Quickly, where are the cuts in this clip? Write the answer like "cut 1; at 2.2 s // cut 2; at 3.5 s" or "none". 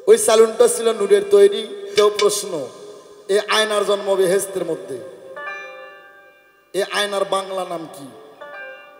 cut 1; at 1.9 s